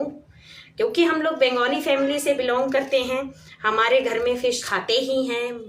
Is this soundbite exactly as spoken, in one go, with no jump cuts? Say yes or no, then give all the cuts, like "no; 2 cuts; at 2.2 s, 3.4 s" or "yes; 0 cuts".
no; 1 cut; at 4.6 s